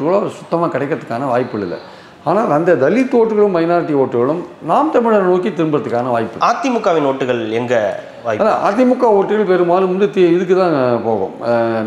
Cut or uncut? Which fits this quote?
uncut